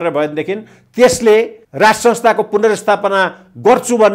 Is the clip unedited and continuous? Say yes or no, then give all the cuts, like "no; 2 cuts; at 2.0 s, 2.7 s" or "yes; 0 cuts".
no; 1 cut; at 1.6 s